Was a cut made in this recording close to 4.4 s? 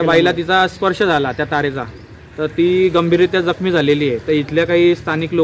no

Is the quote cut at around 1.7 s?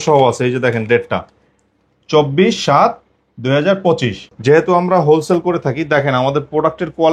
no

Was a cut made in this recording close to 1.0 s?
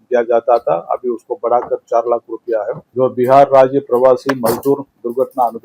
no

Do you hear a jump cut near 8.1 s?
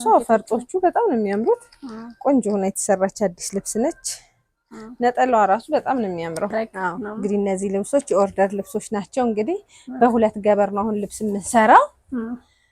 no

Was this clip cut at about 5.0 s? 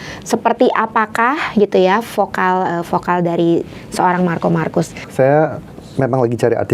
yes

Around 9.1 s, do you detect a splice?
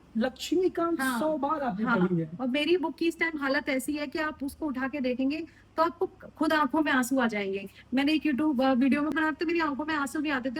yes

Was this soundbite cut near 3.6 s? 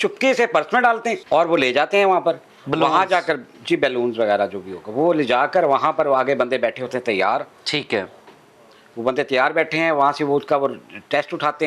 no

